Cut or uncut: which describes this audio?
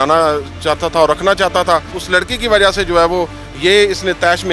cut